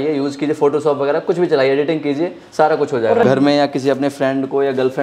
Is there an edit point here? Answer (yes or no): yes